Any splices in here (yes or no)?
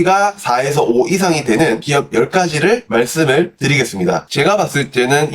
yes